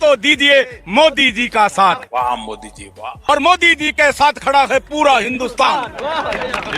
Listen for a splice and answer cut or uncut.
cut